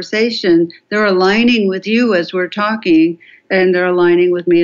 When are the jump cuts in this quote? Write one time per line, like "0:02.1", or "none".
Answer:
0:03.4